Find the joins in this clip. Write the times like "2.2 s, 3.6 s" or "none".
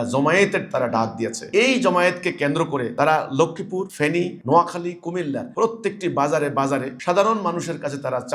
none